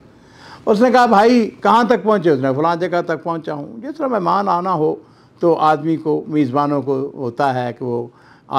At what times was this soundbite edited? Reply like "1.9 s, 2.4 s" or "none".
none